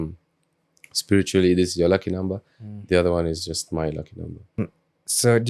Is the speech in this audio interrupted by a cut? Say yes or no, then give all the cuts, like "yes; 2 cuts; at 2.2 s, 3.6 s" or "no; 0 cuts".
yes; 1 cut; at 4.6 s